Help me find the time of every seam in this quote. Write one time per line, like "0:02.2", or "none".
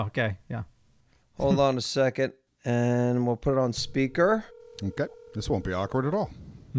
0:02.4